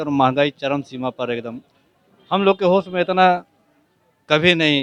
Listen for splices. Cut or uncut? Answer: uncut